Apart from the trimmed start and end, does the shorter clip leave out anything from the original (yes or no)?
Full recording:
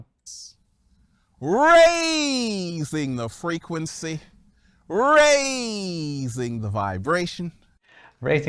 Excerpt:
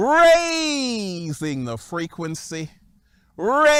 no